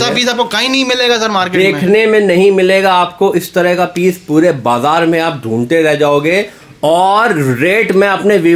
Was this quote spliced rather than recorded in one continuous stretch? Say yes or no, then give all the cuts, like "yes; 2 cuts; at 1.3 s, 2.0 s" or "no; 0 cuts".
no; 0 cuts